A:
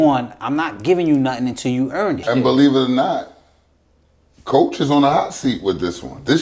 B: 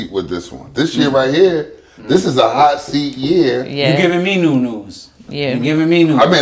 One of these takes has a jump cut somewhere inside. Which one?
A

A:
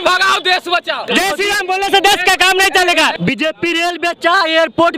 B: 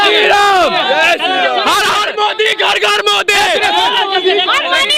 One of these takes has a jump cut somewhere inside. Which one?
A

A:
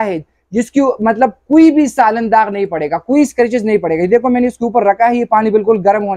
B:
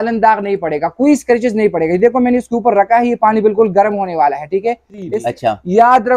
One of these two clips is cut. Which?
B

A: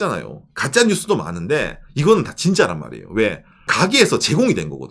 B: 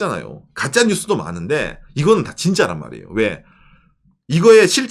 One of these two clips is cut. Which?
A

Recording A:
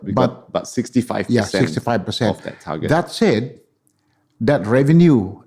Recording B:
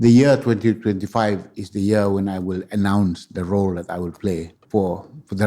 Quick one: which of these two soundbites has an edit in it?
B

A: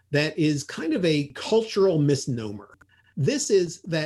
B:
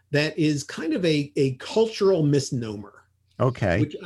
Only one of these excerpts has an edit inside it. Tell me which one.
A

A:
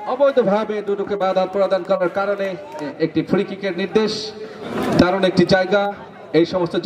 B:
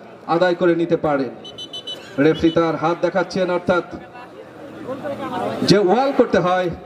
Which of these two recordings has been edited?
A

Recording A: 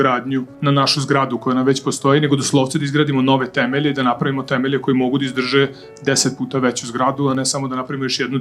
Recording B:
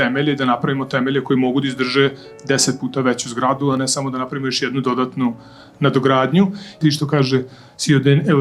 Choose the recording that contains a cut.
B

